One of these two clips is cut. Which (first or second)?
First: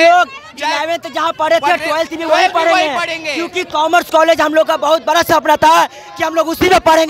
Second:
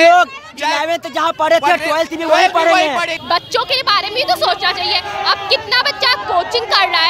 second